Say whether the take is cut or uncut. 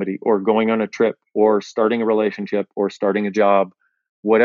uncut